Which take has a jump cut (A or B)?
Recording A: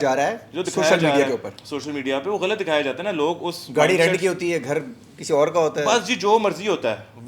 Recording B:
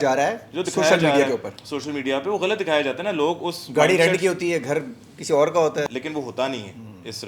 B